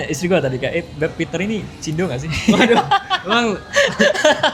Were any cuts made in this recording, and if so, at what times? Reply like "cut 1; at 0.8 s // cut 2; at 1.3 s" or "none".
none